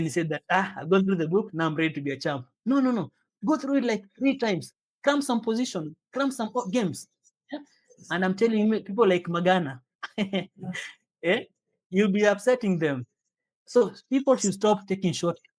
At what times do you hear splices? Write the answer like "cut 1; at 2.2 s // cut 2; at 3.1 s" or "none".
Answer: none